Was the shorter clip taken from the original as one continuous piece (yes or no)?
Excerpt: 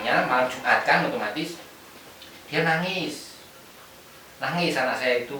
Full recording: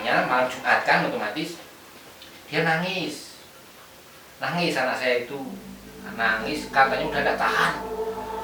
yes